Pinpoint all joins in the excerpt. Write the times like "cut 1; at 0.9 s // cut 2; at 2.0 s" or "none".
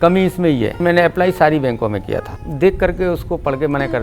cut 1; at 0.8 s // cut 2; at 2.4 s